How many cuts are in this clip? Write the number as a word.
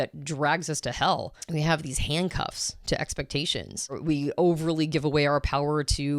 two